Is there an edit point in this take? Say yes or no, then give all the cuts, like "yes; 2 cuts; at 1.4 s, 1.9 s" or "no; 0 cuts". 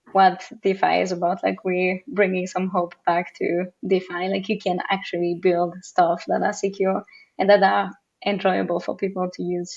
no; 0 cuts